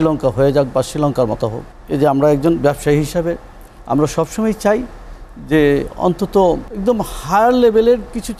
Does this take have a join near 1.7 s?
yes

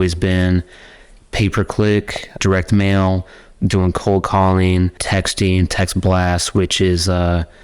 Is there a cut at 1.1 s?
no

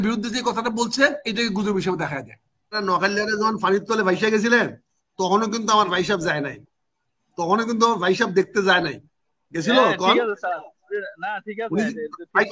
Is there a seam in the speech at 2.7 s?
yes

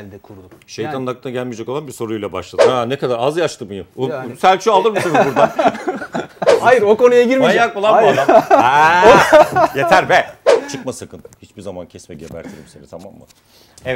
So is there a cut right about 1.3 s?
no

